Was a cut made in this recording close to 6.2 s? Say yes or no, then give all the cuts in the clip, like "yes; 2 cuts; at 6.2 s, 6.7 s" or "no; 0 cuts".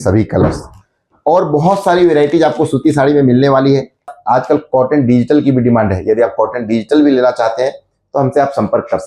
no; 1 cut; at 4.1 s